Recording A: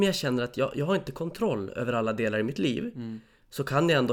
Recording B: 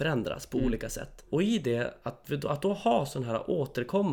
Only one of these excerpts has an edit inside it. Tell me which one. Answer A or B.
B